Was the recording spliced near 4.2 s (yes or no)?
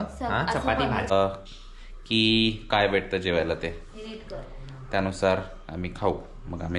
no